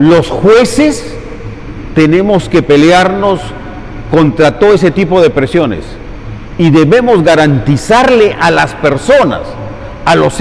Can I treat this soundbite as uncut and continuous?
yes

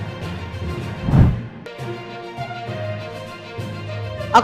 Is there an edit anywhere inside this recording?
yes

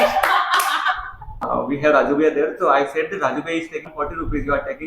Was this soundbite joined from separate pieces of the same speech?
yes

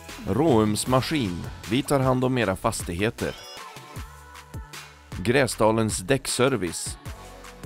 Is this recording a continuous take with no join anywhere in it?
no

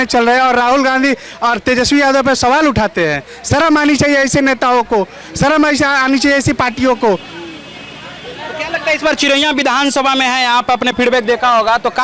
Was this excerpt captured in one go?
yes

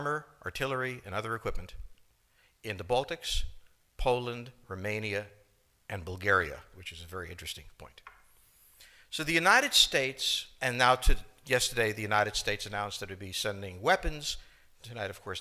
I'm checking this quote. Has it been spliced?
yes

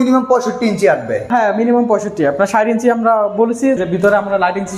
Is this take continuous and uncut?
no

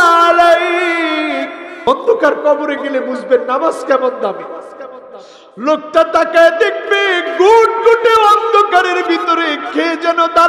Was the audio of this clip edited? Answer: yes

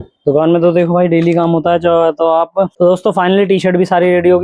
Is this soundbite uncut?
no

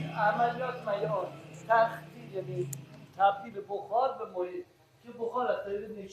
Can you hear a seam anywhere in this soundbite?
no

